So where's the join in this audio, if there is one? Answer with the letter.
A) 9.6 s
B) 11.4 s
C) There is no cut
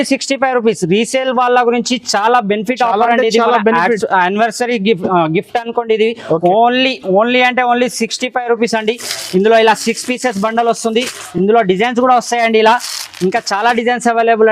C